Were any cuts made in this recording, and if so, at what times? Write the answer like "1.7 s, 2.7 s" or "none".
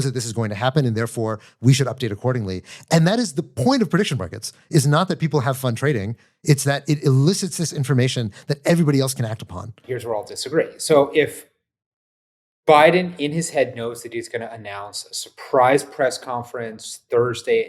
9.7 s